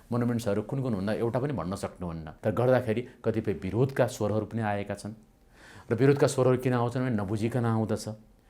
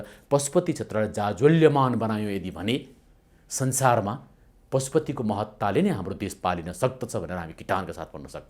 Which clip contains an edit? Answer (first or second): first